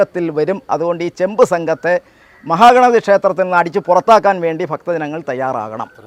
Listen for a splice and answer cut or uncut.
uncut